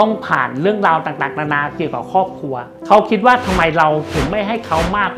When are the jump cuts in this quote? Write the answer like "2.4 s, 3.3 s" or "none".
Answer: 2.7 s